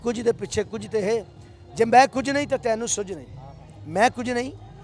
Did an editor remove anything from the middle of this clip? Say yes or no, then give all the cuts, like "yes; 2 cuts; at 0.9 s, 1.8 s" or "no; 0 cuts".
no; 0 cuts